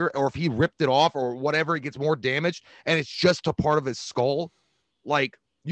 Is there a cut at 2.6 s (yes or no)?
no